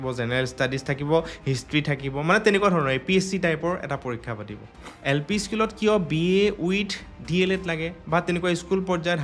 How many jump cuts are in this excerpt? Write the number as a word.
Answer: one